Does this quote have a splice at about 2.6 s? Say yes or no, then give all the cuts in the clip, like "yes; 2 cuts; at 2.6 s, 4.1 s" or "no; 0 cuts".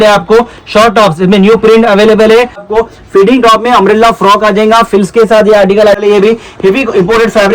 yes; 2 cuts; at 2.6 s, 6.0 s